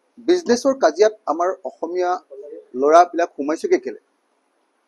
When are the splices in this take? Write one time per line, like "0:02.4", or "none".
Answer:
none